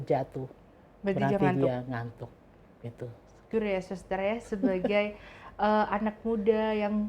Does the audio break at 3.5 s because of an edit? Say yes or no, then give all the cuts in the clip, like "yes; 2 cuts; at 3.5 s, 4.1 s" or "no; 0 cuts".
yes; 1 cut; at 3.5 s